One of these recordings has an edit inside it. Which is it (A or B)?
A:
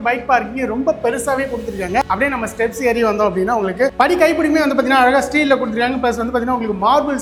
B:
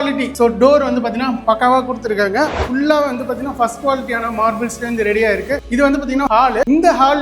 B